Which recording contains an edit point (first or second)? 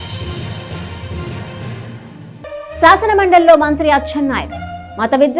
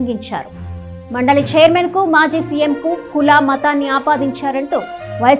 first